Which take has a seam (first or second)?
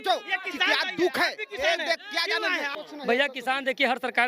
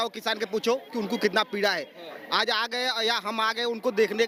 first